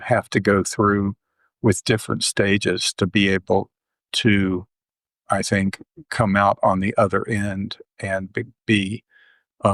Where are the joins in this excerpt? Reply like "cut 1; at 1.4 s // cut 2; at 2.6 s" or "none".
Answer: none